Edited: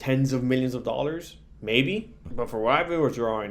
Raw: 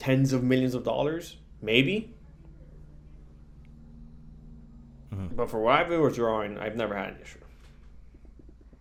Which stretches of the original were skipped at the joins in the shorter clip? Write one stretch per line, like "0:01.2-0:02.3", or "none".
0:02.2-0:05.2